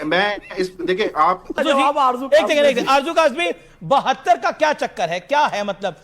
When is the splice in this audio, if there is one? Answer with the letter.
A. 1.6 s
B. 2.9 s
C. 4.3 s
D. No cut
A